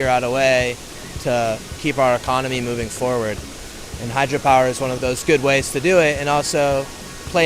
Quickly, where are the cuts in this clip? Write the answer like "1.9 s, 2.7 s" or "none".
1.7 s, 4.9 s